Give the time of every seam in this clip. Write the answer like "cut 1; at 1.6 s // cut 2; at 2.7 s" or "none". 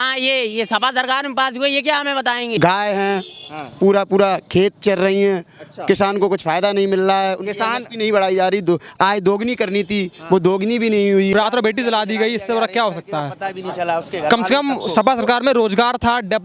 cut 1; at 2.6 s // cut 2; at 11.3 s